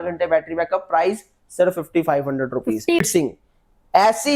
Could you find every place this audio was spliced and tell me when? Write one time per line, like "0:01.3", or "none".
0:03.1